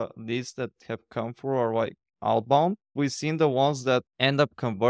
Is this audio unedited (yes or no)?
no